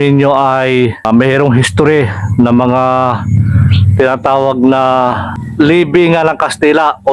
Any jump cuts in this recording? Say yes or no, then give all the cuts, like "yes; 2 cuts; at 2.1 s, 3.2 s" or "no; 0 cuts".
no; 0 cuts